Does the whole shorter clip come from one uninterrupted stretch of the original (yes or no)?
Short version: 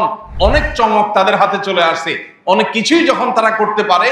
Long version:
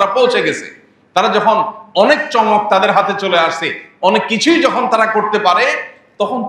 yes